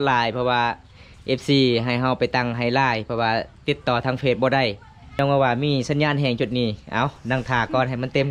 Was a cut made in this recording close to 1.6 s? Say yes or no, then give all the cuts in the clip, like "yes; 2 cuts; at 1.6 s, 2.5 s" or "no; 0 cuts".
no; 1 cut; at 5.2 s